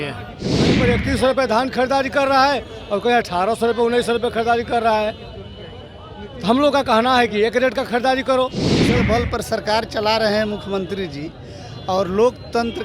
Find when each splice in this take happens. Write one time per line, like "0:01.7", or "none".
0:00.8
0:09.0